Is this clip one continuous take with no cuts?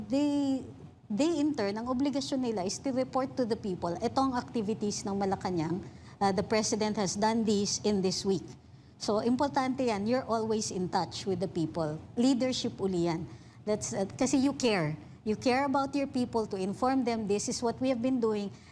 yes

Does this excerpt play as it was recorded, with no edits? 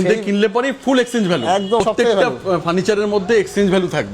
no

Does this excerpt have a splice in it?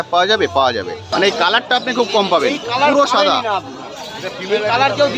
yes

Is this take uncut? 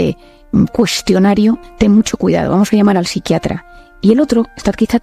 no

